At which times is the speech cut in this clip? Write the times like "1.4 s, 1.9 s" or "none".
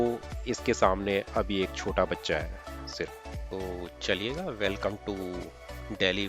3.2 s